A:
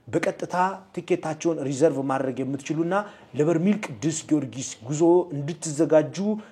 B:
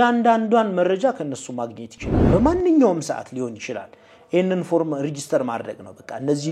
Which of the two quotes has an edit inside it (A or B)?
B